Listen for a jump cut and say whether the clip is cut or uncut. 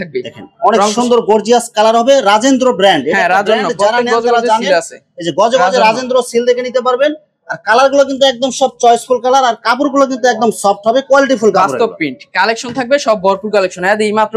uncut